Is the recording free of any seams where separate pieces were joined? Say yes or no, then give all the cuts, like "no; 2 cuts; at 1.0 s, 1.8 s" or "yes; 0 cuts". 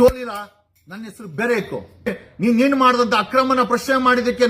no; 1 cut; at 2.2 s